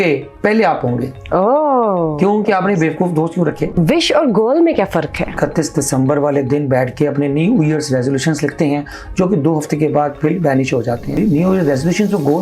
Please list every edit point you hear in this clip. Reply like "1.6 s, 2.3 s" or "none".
3.7 s, 5.3 s, 11.2 s